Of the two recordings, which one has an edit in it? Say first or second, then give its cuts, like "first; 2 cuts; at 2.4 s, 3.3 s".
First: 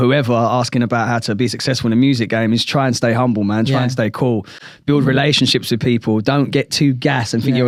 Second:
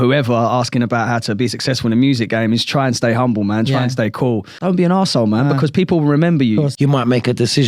second; 2 cuts; at 4.5 s, 6.7 s